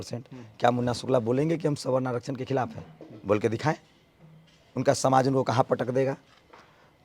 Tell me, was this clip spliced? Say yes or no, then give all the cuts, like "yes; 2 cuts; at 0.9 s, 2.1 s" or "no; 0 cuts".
no; 0 cuts